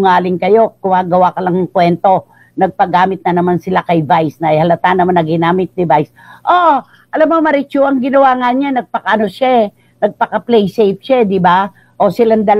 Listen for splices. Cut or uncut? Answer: uncut